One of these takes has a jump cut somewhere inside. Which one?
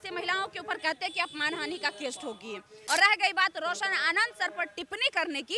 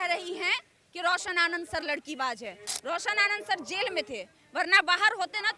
first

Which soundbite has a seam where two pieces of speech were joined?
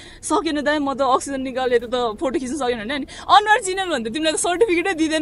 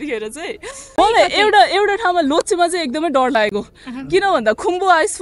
second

